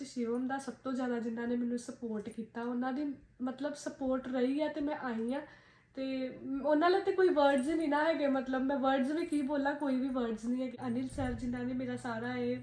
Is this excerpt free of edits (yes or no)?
no